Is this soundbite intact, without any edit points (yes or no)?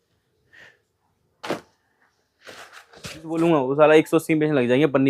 no